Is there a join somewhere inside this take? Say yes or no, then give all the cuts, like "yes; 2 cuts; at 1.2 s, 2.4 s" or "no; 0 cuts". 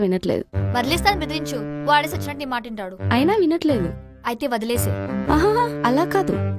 no; 0 cuts